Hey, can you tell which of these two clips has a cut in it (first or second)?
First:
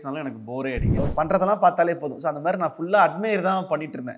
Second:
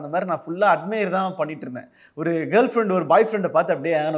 first